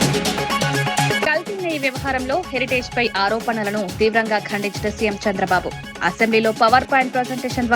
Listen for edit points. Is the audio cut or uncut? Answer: uncut